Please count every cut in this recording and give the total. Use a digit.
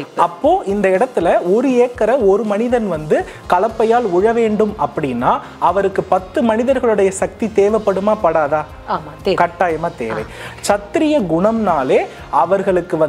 1